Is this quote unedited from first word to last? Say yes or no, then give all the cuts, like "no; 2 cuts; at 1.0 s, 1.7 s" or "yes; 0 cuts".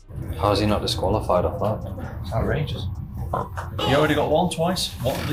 yes; 0 cuts